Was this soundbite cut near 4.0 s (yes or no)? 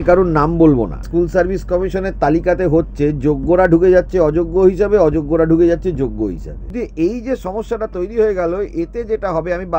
no